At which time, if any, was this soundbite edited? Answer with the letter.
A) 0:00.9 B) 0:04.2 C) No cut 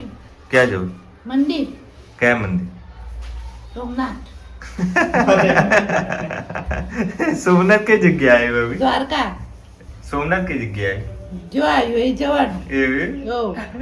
C